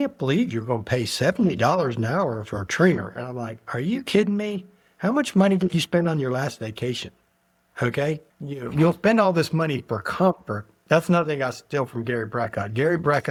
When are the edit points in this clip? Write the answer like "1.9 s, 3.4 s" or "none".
none